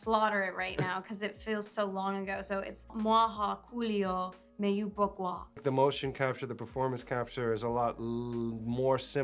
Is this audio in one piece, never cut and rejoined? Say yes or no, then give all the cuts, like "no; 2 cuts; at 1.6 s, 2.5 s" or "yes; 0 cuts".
no; 2 cuts; at 2.9 s, 5.6 s